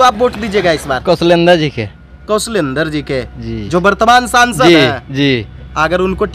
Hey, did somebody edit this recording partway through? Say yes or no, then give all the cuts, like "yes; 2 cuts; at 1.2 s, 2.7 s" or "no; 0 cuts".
no; 0 cuts